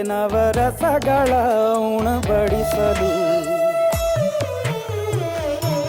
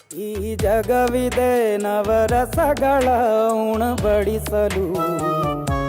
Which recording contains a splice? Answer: second; 1 cut; at 4.1 s

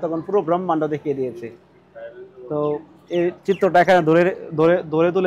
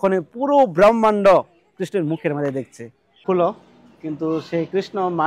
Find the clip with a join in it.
second; 1 cut; at 3.2 s

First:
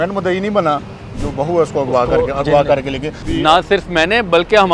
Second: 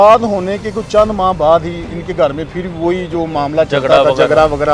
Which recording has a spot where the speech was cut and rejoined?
first; 2 cuts; at 1.1 s, 3.2 s

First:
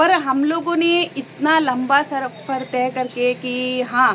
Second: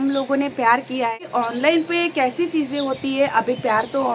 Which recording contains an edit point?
second; 1 cut; at 1.3 s

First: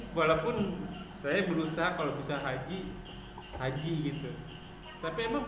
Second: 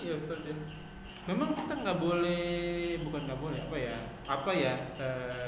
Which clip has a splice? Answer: second; 1 cut; at 1.1 s

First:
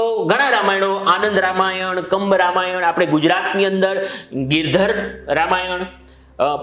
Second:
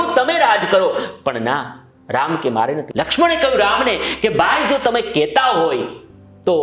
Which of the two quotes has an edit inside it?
second; 1 cut; at 2.9 s

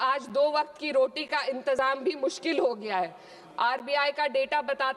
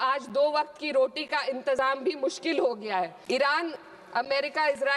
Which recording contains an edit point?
second; 1 cut; at 3.2 s

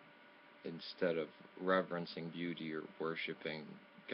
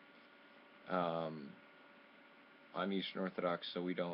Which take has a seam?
second; 1 cut; at 1.1 s

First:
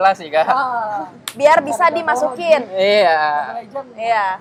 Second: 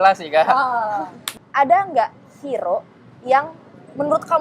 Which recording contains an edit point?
second; 1 cut; at 1.2 s

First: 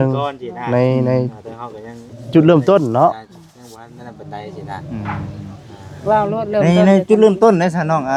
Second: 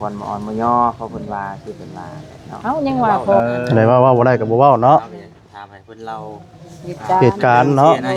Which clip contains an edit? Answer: second; 1 cut; at 3.4 s

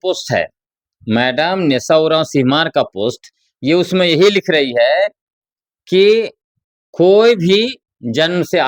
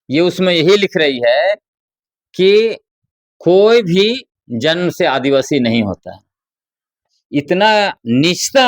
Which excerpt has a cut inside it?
second; 1 cut; at 7.2 s

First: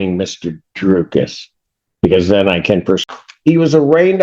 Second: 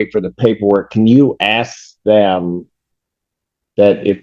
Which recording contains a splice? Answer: first; 1 cut; at 3.0 s

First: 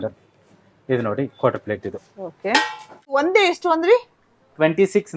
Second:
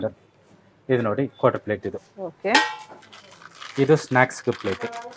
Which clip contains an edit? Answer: first; 1 cut; at 3.2 s

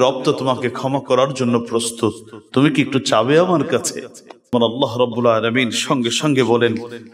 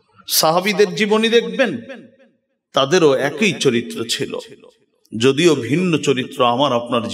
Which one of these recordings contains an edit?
first; 1 cut; at 4.5 s

